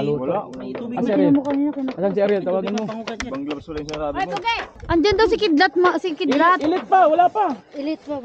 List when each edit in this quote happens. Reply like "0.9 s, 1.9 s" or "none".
4.7 s